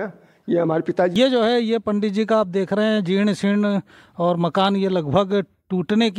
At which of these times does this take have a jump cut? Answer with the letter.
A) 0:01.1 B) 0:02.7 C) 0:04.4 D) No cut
A